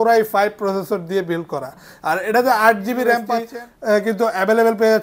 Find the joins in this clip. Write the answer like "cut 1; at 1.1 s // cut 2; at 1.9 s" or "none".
cut 1; at 3.4 s